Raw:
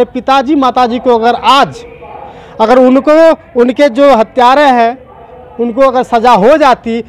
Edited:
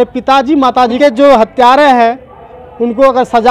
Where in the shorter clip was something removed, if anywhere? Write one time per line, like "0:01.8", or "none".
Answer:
0:01.0